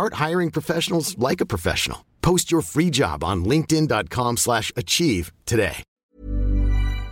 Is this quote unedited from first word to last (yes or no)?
no